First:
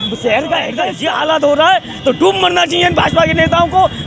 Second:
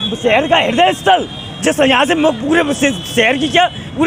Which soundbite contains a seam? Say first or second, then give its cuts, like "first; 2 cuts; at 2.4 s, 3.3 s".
first; 1 cut; at 0.9 s